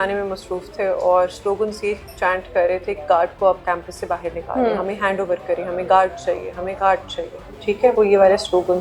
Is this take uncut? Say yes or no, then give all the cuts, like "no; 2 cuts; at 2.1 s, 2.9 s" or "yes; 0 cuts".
yes; 0 cuts